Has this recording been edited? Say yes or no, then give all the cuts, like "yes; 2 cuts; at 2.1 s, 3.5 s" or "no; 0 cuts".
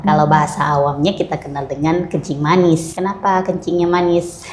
yes; 1 cut; at 2.9 s